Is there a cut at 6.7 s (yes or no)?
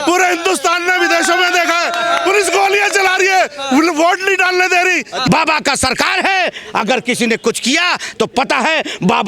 no